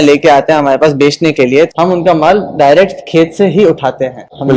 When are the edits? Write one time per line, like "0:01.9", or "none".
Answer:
0:01.7